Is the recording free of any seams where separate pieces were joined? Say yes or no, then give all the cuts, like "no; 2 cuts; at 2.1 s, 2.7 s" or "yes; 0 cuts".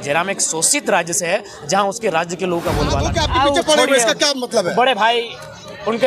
no; 1 cut; at 3.1 s